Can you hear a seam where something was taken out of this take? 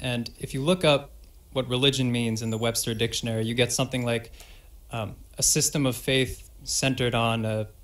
yes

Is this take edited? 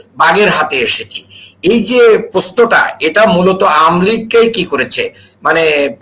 no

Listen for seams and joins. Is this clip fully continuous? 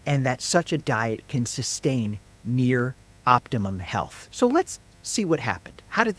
no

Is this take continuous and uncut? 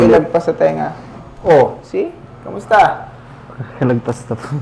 yes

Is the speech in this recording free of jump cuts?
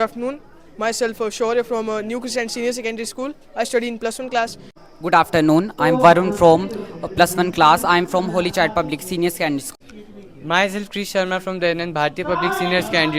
no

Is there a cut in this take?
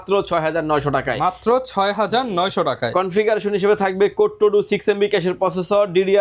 no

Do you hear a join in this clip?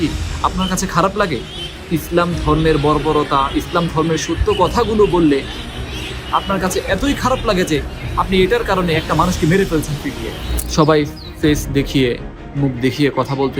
yes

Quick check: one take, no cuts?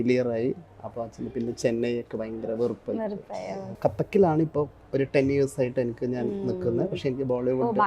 no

